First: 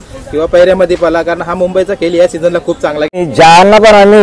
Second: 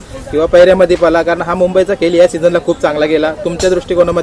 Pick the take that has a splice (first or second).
first